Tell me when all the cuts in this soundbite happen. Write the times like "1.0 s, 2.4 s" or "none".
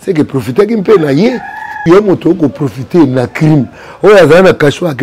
1.7 s